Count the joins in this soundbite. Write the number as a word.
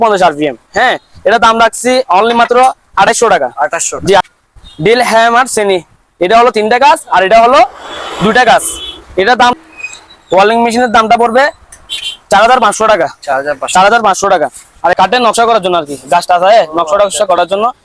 three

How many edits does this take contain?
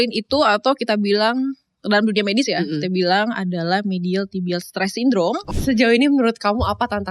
one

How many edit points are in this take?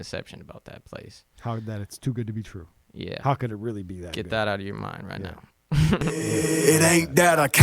one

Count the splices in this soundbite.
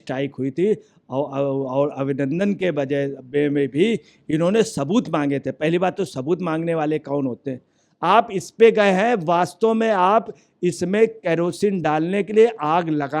one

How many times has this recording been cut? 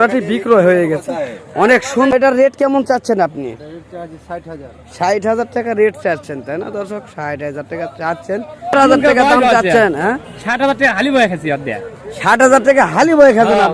two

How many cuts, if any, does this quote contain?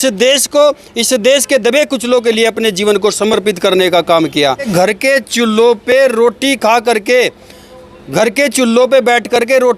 one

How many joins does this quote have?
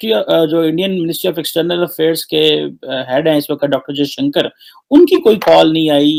zero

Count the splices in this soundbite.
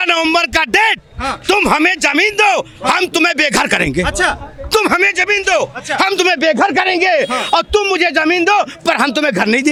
zero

